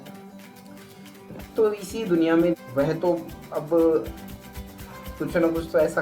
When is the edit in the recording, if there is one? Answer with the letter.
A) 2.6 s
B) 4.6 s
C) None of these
A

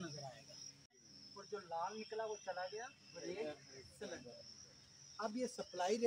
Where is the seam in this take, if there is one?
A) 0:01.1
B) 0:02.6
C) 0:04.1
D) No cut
A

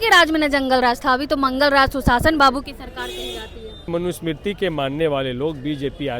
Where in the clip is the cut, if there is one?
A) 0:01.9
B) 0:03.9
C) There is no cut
B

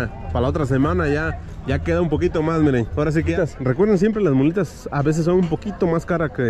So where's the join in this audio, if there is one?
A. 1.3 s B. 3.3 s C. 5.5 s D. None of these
B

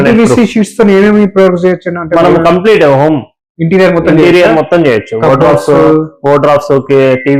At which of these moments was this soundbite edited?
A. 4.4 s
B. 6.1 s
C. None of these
C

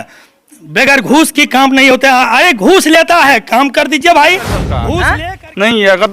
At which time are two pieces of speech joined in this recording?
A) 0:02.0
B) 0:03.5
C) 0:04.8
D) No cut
C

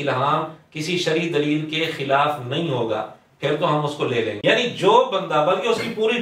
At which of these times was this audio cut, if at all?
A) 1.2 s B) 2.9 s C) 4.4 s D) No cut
C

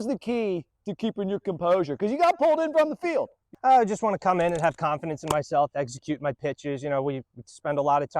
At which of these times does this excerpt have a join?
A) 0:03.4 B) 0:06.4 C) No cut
A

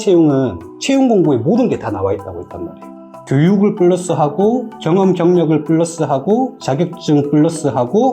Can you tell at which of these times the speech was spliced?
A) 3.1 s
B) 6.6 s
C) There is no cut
A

